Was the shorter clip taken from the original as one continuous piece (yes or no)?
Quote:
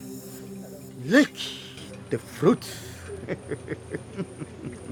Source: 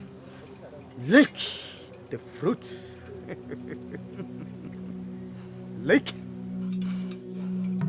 yes